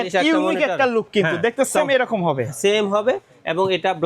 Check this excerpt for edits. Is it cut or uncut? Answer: uncut